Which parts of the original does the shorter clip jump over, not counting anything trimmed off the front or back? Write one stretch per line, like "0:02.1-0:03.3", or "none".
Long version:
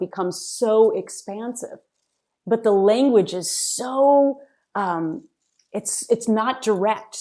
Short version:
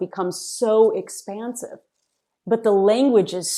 none